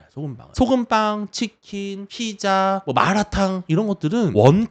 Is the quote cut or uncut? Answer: uncut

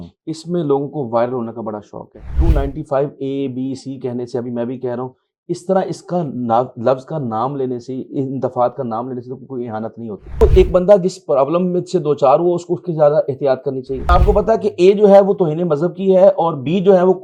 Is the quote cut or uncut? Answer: cut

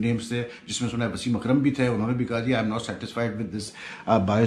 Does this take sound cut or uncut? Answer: uncut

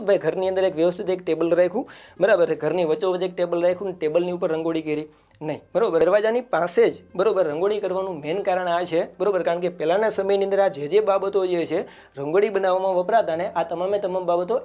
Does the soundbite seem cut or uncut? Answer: uncut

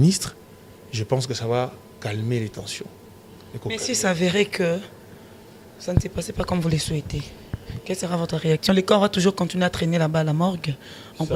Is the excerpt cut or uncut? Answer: uncut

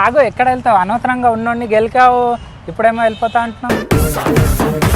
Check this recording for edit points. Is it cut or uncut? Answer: uncut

